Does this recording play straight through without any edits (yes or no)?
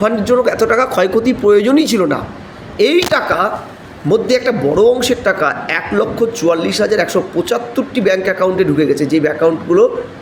yes